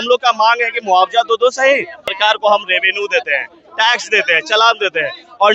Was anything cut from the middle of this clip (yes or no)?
yes